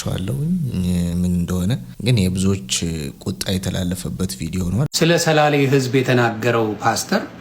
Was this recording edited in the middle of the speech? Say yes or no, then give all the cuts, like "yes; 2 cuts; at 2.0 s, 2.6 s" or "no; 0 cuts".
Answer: yes; 2 cuts; at 1.9 s, 4.9 s